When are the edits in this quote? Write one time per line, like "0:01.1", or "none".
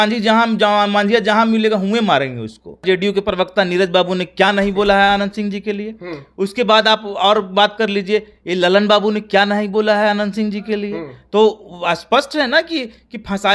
0:02.8